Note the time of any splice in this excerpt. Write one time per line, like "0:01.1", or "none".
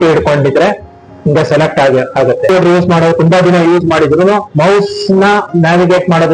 0:02.5